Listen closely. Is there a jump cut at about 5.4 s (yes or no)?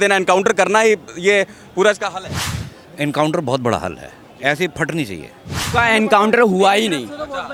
no